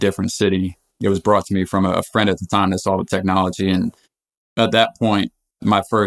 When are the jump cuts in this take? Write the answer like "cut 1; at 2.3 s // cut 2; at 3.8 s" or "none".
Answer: cut 1; at 2.1 s